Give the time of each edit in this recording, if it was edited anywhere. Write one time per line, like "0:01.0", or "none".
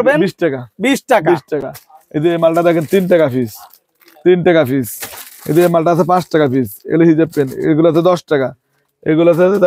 none